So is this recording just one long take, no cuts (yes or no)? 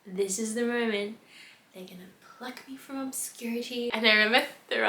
no